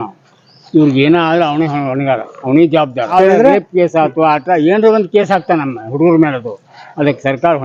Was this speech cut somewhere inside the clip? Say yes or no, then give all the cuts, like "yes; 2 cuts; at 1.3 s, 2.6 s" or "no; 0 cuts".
yes; 1 cut; at 3.1 s